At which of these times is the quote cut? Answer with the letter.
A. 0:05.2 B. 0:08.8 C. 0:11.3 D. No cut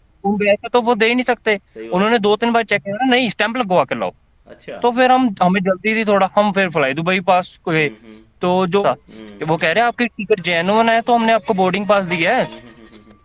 B